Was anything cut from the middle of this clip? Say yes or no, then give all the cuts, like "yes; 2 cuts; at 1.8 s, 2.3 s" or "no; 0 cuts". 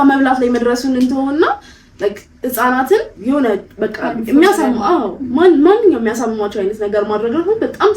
yes; 1 cut; at 3.1 s